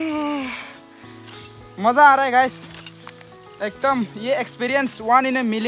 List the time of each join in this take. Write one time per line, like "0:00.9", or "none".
none